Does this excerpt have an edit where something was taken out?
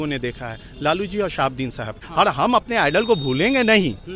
yes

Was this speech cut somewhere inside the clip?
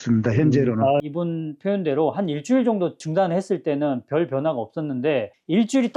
yes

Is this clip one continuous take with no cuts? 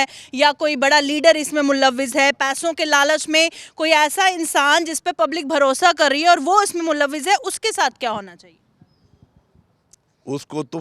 yes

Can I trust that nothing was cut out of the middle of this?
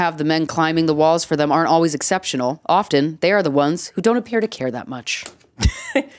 yes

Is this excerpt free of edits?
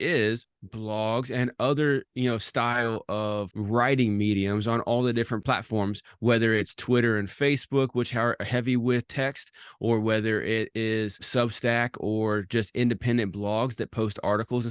no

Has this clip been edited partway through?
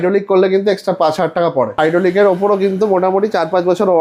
yes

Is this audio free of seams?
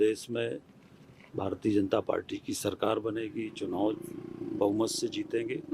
yes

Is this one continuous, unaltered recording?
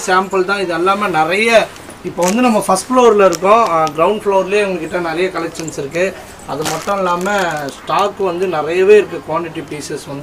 yes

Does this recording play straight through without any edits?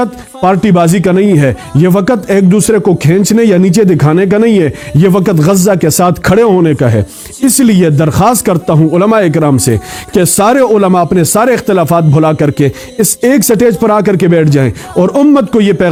yes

